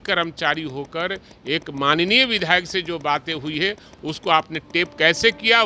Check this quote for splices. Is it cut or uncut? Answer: uncut